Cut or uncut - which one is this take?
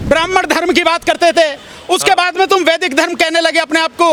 uncut